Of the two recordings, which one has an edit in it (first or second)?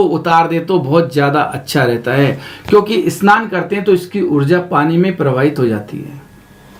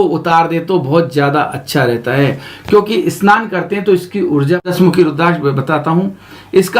second